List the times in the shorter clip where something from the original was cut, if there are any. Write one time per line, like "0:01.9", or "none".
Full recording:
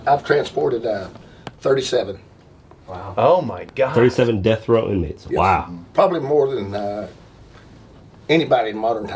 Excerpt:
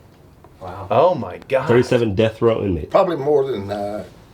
0:02.8